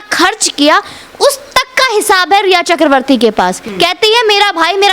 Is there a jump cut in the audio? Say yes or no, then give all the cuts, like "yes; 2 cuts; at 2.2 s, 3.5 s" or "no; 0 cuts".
yes; 1 cut; at 3.6 s